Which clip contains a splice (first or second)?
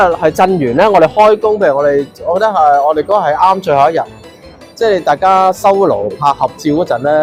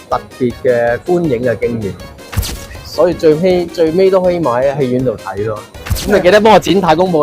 second